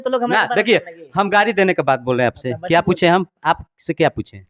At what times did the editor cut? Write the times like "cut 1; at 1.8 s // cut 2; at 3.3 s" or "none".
none